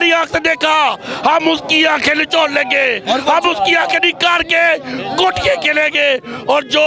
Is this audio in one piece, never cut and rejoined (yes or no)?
yes